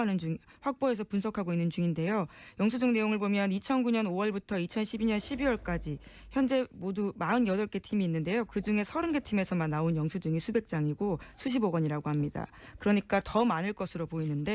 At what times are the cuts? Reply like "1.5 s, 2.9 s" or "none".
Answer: none